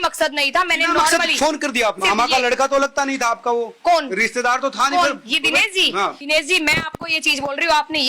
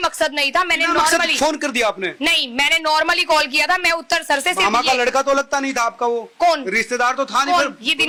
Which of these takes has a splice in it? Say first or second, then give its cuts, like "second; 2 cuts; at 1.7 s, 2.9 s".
first; 2 cuts; at 2.0 s, 6.2 s